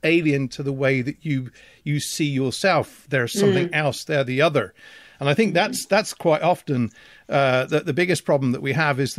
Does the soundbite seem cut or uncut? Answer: uncut